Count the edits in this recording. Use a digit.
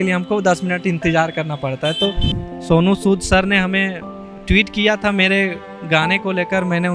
1